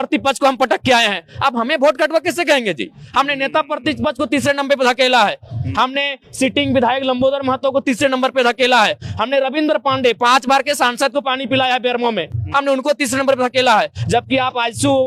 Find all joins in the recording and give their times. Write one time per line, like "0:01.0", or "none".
none